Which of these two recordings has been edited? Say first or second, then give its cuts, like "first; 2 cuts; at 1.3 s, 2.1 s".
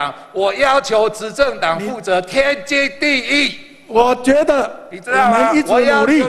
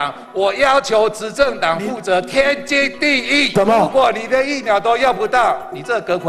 second; 1 cut; at 3.5 s